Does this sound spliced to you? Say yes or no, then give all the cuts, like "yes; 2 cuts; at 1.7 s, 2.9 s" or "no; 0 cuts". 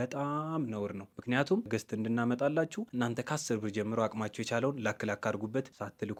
no; 0 cuts